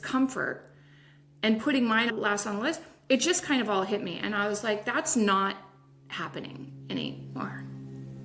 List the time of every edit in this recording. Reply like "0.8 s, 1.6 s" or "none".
2.1 s